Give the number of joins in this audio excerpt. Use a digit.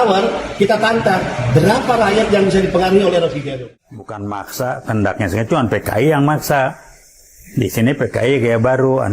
1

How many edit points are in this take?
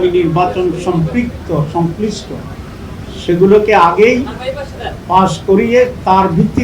0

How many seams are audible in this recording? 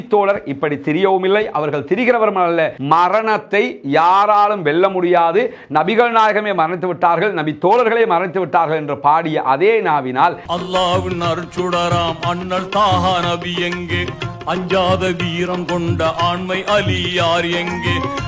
2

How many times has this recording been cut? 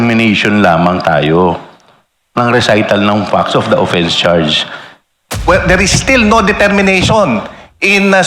1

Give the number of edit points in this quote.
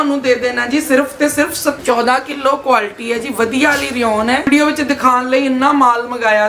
2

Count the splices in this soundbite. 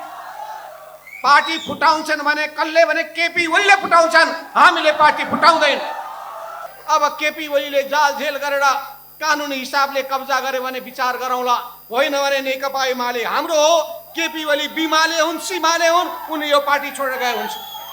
1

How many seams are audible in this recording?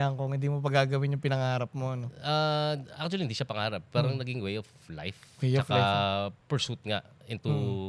0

